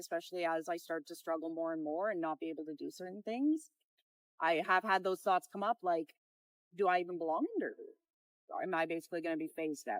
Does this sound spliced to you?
no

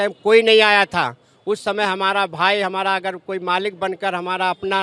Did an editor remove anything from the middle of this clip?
no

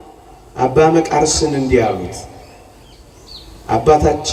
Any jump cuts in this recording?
no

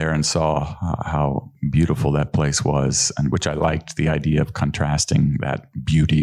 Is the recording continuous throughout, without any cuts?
yes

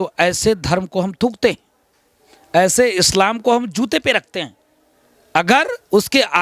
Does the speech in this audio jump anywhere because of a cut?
no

